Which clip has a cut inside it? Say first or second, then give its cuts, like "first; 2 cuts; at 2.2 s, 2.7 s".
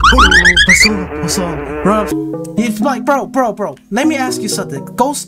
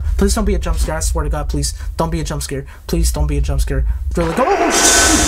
first; 2 cuts; at 2.1 s, 3.8 s